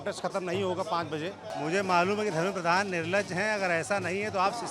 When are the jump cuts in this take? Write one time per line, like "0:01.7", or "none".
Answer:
0:01.5